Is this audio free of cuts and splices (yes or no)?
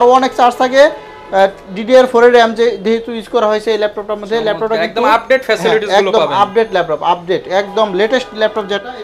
yes